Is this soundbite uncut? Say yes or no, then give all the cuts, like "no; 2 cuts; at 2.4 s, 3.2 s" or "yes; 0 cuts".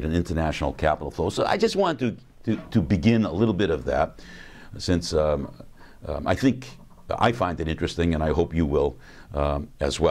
no; 1 cut; at 4.0 s